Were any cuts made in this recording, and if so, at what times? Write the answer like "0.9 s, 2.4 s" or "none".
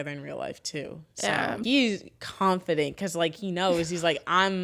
1.6 s